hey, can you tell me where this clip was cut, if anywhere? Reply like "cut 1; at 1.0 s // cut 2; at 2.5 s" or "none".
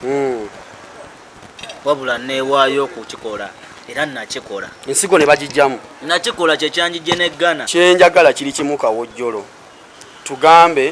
cut 1; at 7.6 s